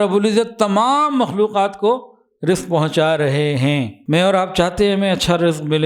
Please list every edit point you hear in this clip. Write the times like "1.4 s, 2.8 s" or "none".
4.0 s